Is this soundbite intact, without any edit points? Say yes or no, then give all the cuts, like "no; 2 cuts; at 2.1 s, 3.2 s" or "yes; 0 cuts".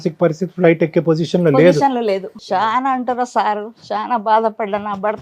no; 1 cut; at 2.3 s